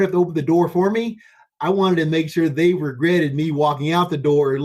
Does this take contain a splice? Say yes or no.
no